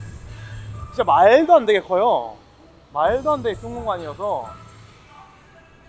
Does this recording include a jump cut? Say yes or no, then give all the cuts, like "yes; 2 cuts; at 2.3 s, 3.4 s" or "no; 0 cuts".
no; 0 cuts